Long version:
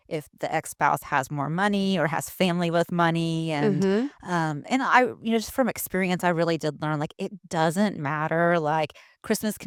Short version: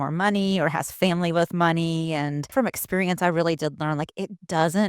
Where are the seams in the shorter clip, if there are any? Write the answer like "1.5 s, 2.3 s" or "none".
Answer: 2.4 s